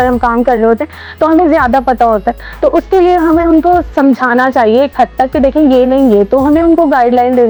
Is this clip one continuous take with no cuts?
yes; 0 cuts

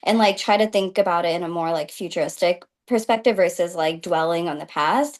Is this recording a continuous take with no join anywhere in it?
yes; 0 cuts

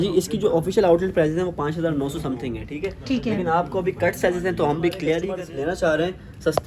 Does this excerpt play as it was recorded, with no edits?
no; 1 cut; at 5.3 s

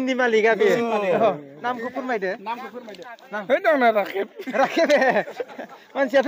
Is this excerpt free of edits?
yes; 0 cuts

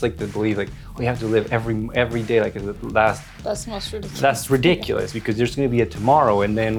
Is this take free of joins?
yes; 0 cuts

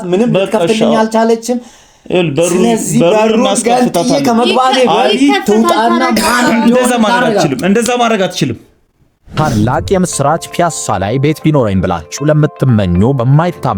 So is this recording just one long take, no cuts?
no; 1 cut; at 9.4 s

